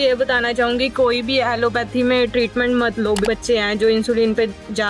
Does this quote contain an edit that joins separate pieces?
yes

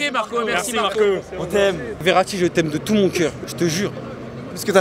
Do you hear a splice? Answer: yes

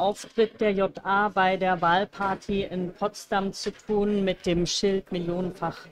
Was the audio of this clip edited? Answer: no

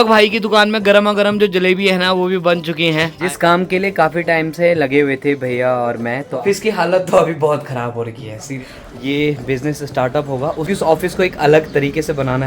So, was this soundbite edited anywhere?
yes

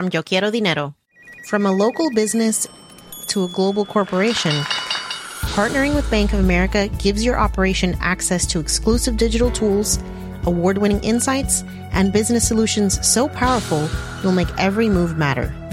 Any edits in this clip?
yes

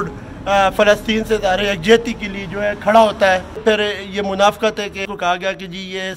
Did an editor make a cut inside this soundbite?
yes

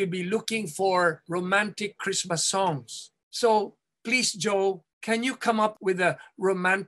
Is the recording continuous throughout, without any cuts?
yes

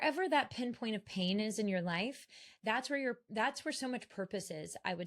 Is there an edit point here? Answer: no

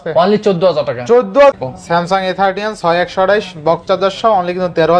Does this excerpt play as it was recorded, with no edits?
no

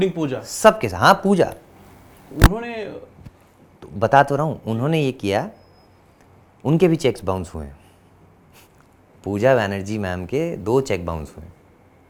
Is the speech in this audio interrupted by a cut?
no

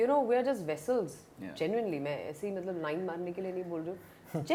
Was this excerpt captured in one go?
yes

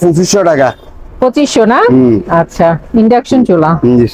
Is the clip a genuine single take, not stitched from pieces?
yes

